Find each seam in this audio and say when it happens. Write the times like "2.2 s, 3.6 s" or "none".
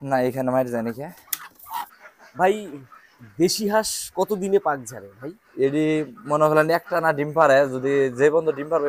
1.9 s